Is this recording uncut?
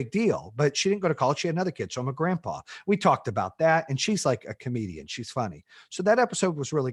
yes; 0 cuts

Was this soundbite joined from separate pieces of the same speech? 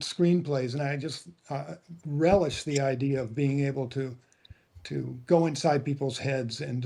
no; 0 cuts

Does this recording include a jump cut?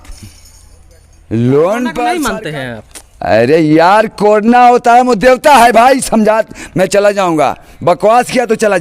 yes; 1 cut; at 2.2 s

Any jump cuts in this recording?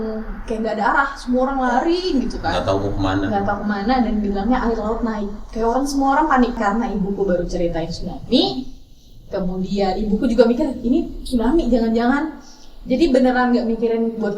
yes; 1 cut; at 6.6 s

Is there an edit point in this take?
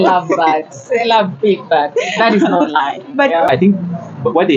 yes; 1 cut; at 3.5 s

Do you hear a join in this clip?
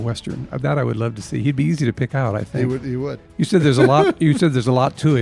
no; 0 cuts

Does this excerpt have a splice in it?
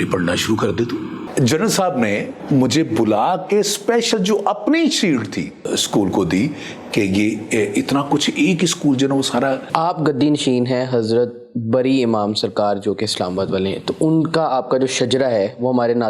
yes; 4 cuts; at 1.2 s, 2.3 s, 5.7 s, 9.7 s

